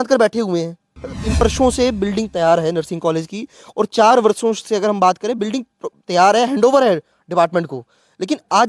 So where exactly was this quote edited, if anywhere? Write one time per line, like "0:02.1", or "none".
0:01.4